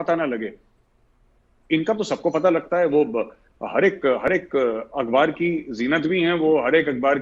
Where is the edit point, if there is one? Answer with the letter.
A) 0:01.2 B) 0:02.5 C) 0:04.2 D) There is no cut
D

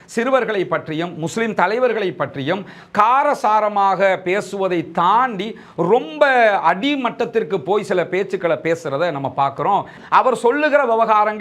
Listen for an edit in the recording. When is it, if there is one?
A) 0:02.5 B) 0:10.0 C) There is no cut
B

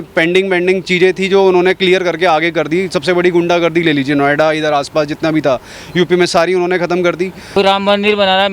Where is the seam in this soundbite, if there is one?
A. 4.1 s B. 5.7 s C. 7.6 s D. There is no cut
C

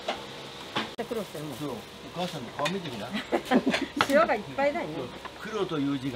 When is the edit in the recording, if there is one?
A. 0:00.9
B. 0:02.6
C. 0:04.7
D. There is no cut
A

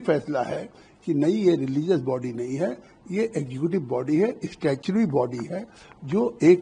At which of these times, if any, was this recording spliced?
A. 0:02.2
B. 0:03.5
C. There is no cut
C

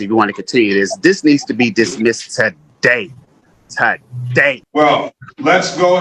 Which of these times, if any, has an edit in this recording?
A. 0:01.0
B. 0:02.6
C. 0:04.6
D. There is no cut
C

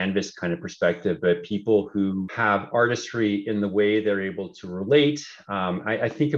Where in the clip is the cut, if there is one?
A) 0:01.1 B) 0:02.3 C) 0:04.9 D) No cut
B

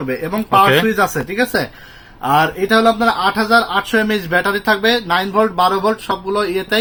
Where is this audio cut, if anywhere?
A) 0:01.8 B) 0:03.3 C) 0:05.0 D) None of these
D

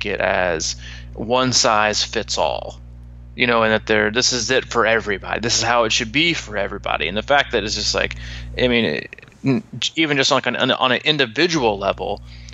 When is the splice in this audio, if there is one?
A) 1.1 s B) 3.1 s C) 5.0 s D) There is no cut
D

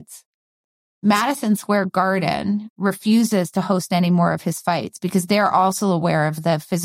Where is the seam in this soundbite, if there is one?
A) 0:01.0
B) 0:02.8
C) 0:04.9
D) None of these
D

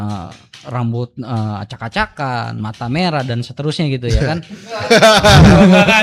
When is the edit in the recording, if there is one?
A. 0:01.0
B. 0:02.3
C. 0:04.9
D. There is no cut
D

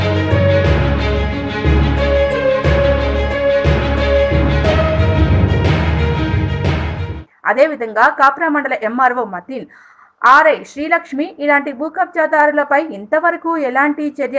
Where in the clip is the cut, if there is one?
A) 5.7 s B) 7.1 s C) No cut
B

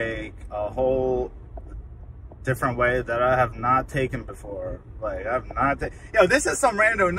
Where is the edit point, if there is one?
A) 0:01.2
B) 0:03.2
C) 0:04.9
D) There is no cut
D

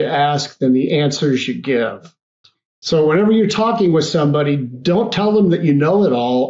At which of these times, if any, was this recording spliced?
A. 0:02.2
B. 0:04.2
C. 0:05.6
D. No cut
D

